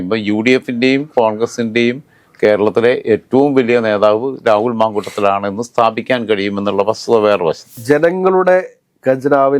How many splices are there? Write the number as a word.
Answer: one